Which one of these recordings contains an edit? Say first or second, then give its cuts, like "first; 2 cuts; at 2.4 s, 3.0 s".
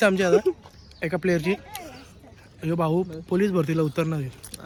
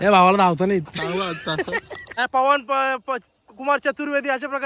second; 1 cut; at 2.0 s